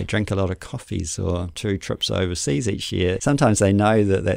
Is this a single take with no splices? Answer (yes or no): no